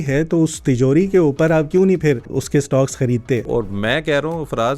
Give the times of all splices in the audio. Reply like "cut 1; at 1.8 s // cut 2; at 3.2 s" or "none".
cut 1; at 2.3 s // cut 2; at 3.5 s